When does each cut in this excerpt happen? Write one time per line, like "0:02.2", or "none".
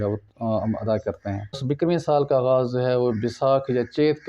0:01.6